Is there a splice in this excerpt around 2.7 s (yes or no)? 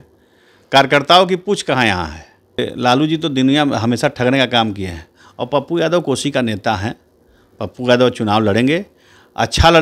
yes